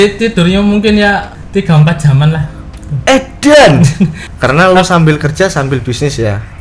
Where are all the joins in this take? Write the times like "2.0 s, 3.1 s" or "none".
1.4 s, 4.2 s